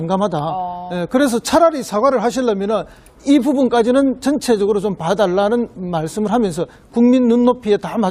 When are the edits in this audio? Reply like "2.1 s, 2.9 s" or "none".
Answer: 1.8 s